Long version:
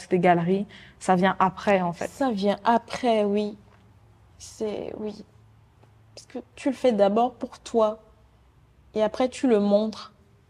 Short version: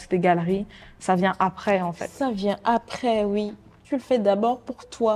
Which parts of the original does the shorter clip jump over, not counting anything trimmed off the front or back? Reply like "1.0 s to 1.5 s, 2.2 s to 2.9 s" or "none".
3.7 s to 6.4 s